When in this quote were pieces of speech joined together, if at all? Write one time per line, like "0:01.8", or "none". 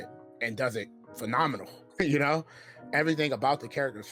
0:01.8

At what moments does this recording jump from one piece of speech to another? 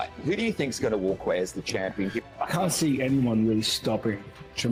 none

